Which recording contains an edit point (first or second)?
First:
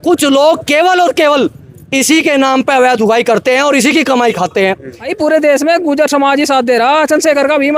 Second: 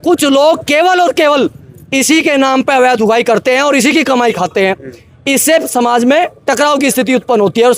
first